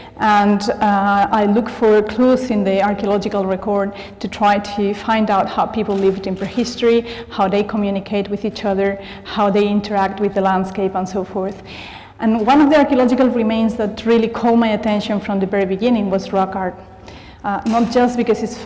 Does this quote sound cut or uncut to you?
cut